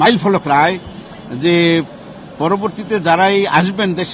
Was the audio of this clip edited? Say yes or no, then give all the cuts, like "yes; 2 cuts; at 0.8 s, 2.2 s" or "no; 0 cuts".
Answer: no; 0 cuts